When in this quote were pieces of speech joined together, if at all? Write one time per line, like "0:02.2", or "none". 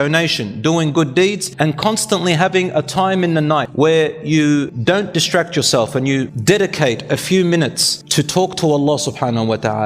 0:01.4
0:03.7
0:04.7
0:06.3